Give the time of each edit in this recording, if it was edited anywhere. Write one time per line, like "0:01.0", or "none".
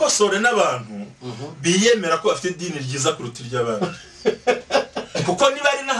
0:02.2